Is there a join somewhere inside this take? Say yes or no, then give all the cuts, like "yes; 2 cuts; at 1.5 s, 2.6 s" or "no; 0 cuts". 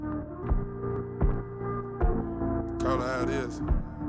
yes; 1 cut; at 1.0 s